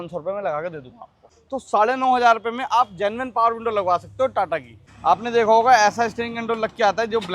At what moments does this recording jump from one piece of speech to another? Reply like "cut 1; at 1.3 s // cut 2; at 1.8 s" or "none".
cut 1; at 1.3 s // cut 2; at 4.9 s